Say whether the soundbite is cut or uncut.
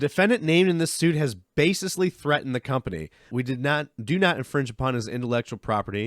cut